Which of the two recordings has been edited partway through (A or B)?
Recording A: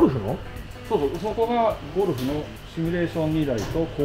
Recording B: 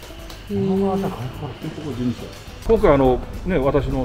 B